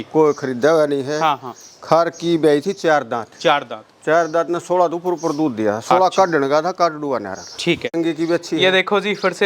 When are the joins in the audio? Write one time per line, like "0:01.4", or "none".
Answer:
0:07.9